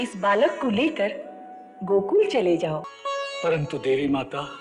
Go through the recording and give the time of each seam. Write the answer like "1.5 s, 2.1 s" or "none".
2.9 s